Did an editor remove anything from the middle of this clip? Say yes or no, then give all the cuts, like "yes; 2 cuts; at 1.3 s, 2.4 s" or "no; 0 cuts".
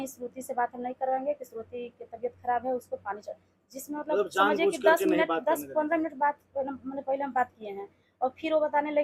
no; 0 cuts